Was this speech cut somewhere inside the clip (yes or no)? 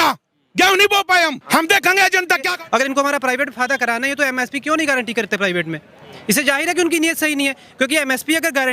yes